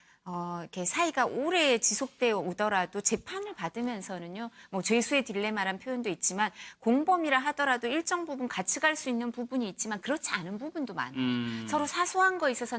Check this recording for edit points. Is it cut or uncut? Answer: uncut